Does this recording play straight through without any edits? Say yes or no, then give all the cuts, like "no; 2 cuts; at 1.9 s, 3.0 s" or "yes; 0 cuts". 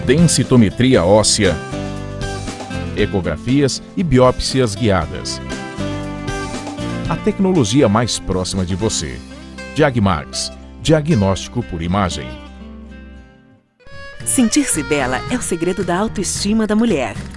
no; 1 cut; at 13.7 s